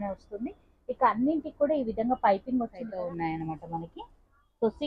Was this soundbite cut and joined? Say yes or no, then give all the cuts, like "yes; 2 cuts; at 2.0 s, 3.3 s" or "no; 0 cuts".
yes; 1 cut; at 2.8 s